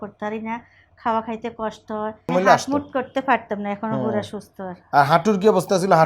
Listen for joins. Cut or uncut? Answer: cut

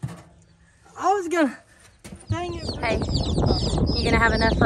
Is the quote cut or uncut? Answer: cut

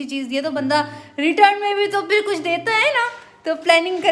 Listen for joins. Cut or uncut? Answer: uncut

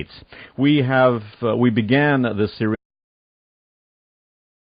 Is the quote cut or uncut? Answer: uncut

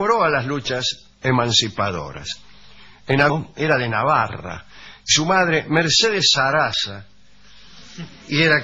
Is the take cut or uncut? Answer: uncut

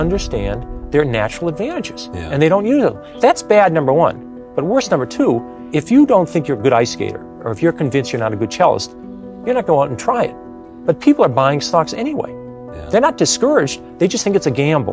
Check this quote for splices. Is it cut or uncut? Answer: cut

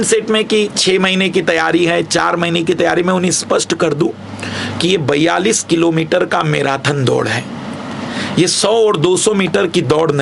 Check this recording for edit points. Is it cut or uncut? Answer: uncut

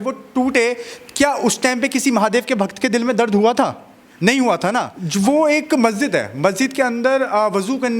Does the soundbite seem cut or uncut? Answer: cut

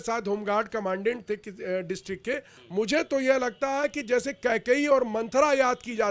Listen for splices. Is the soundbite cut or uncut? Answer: cut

